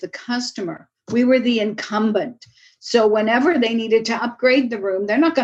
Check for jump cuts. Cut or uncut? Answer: uncut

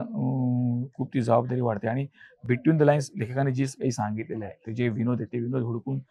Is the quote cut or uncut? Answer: uncut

